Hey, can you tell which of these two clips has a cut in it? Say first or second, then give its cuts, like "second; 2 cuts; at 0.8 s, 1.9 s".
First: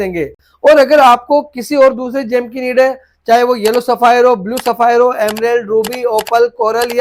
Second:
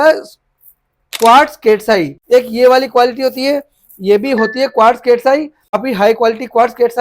second; 2 cuts; at 2.1 s, 5.8 s